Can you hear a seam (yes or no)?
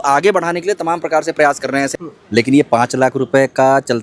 yes